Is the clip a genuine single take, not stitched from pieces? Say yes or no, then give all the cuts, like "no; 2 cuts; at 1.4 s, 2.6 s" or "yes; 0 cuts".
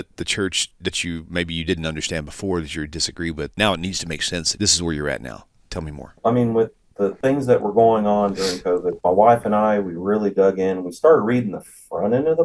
no; 5 cuts; at 3.5 s, 4.5 s, 6.2 s, 7.2 s, 9.0 s